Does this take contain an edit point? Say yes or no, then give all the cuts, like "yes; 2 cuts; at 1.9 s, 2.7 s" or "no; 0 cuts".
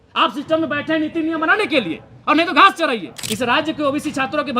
yes; 1 cut; at 3.2 s